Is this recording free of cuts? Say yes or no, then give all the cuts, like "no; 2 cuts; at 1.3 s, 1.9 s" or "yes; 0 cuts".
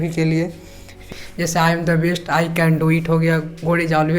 no; 1 cut; at 1.0 s